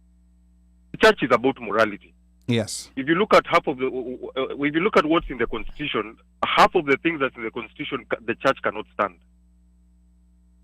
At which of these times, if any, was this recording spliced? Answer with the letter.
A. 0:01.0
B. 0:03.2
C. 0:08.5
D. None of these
A